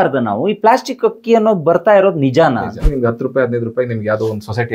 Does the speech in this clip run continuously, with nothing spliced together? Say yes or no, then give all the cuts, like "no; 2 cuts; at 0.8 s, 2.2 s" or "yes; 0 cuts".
no; 1 cut; at 2.9 s